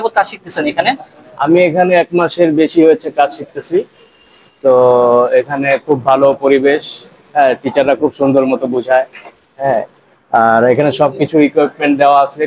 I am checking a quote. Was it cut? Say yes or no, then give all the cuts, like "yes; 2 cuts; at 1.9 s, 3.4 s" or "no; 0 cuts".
no; 0 cuts